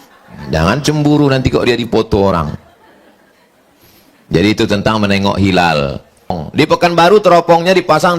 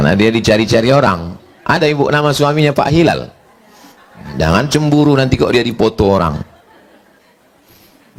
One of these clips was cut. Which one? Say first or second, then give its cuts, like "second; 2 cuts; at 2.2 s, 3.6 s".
first; 1 cut; at 6.4 s